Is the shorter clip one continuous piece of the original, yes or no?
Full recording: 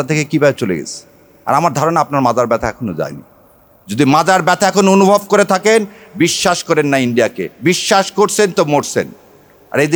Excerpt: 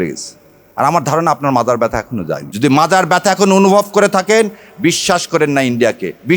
no